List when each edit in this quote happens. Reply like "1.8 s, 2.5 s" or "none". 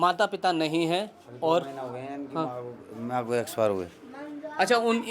none